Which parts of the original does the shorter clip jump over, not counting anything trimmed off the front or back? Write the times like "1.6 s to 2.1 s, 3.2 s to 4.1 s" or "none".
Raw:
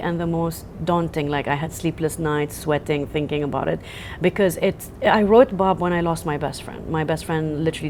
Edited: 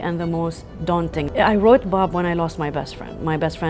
1.3 s to 4.9 s